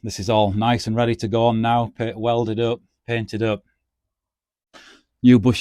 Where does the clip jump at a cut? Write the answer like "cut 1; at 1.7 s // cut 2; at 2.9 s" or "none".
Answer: none